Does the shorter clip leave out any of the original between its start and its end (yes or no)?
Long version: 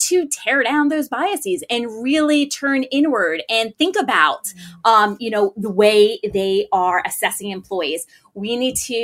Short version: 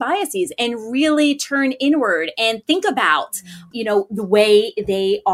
yes